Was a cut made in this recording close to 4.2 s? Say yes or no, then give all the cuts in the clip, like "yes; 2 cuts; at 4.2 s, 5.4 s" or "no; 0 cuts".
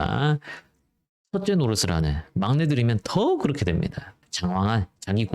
yes; 1 cut; at 4.2 s